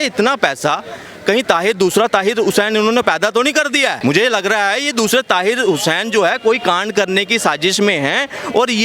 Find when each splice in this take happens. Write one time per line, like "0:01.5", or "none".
none